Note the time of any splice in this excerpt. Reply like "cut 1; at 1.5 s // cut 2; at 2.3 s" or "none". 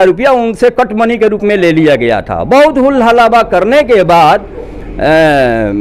none